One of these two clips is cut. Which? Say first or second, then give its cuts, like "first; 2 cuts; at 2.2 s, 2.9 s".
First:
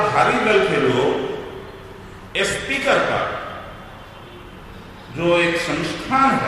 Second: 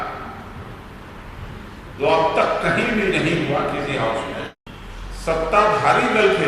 second; 1 cut; at 4.6 s